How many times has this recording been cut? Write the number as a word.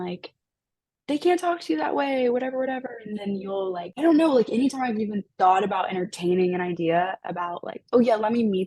one